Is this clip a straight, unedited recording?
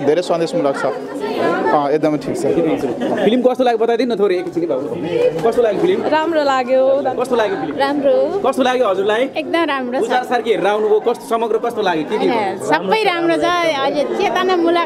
yes; 0 cuts

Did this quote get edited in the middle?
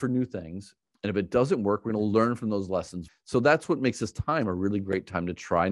yes; 1 cut; at 3.0 s

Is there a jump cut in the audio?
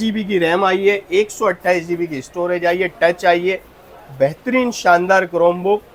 no; 0 cuts

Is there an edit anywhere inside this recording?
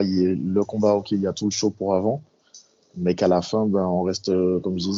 no; 0 cuts

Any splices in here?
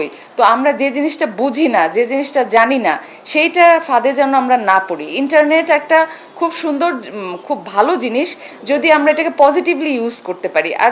no; 0 cuts

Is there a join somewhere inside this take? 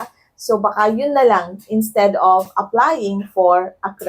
no; 0 cuts

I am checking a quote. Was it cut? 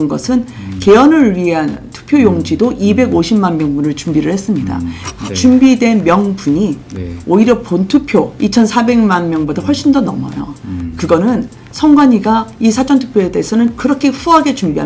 yes; 1 cut; at 5.1 s

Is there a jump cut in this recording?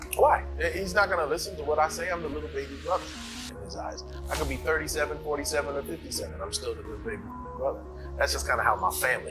no; 0 cuts

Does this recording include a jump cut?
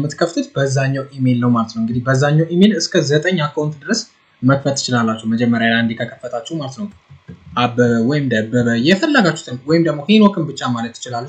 yes; 1 cut; at 7.1 s

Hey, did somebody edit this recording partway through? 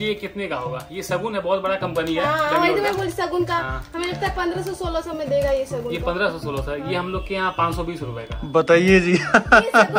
no; 0 cuts

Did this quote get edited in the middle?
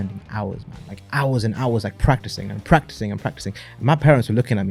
no; 0 cuts

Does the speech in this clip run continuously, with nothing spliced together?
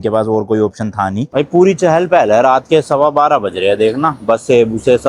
no; 1 cut; at 1.3 s

